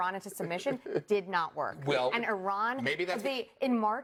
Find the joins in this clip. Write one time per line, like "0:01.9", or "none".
none